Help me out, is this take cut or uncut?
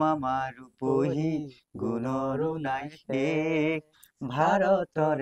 uncut